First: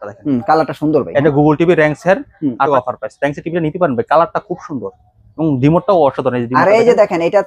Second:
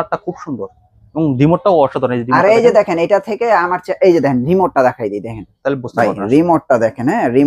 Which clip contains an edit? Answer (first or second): first